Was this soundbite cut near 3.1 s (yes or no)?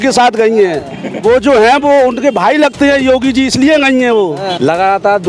no